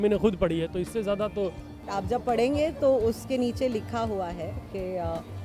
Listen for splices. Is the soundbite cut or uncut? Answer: cut